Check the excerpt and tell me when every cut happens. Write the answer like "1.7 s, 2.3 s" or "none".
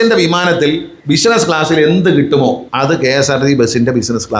0.9 s, 2.7 s